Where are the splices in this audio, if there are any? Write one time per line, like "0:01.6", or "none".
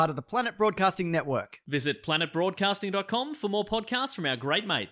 none